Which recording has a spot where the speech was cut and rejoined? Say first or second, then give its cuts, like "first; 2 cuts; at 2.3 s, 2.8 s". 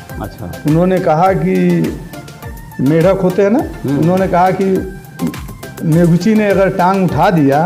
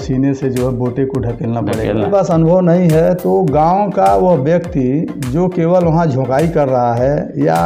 second; 1 cut; at 2.1 s